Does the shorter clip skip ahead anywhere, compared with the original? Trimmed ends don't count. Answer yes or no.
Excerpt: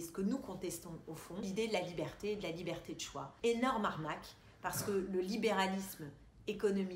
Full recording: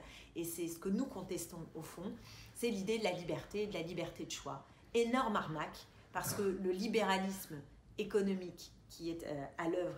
yes